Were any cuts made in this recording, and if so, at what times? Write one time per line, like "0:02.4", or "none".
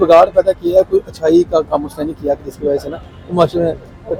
none